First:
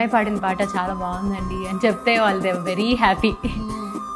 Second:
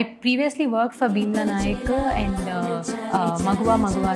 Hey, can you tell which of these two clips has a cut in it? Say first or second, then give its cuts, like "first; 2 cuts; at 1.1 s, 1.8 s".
second; 1 cut; at 2.9 s